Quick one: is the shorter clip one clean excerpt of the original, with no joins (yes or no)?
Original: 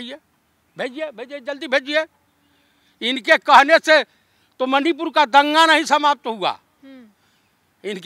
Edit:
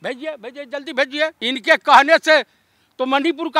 no